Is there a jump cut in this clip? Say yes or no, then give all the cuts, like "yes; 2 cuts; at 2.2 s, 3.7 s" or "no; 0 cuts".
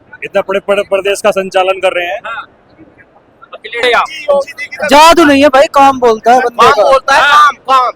yes; 1 cut; at 3.8 s